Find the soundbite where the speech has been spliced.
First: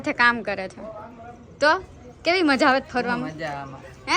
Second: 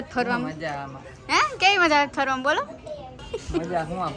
second; 1 cut; at 3.3 s

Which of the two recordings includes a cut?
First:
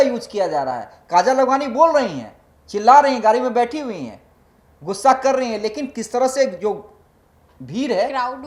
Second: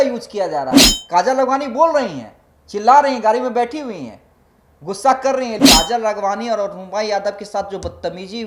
second; 1 cut; at 5.6 s

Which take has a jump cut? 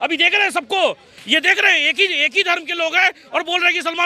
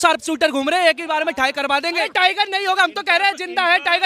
second; 1 cut; at 2.0 s

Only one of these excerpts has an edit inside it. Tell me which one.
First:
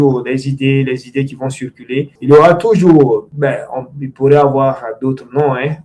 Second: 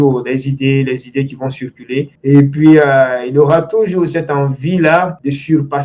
second; 1 cut; at 2.1 s

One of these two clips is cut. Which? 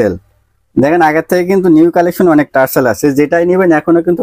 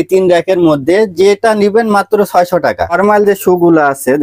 second; 1 cut; at 2.9 s

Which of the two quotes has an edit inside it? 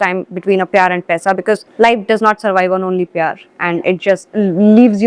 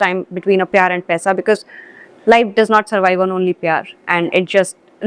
first; 2 cuts; at 1.7 s, 4.3 s

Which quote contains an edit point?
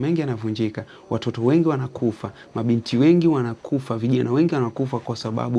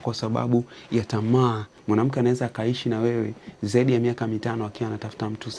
second; 1 cut; at 1.7 s

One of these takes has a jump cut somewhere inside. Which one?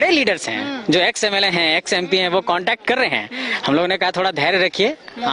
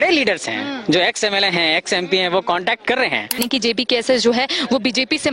second; 1 cut; at 3.6 s

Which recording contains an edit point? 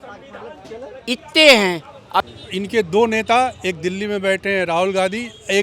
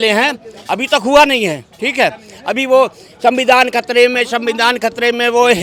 first; 1 cut; at 2.2 s

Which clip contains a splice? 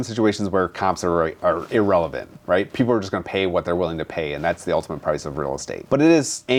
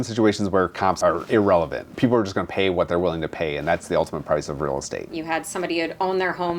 second; 3 cuts; at 1.0 s, 1.9 s, 5.1 s

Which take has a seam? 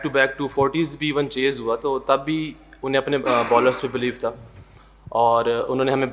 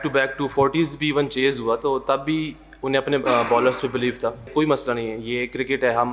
second; 1 cut; at 4.5 s

